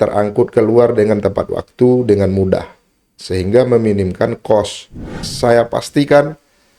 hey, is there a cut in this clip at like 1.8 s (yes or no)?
no